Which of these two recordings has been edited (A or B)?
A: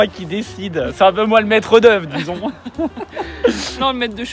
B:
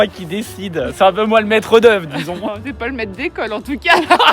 B